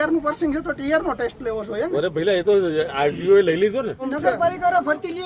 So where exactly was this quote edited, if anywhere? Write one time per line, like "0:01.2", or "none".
0:04.1